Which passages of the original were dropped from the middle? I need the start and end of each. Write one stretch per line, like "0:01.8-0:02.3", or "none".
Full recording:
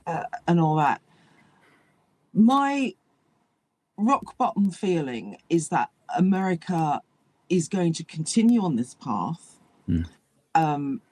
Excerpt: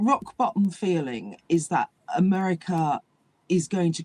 none